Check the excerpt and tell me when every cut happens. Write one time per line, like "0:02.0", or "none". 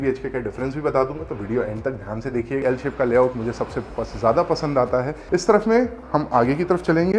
0:02.6
0:05.2